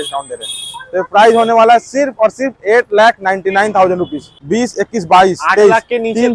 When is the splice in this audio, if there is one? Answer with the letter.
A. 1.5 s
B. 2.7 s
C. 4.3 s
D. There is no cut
C